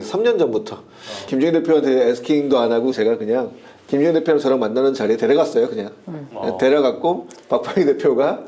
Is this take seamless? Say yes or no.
yes